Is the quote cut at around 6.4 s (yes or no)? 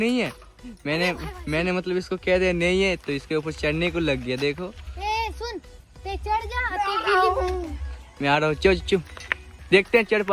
no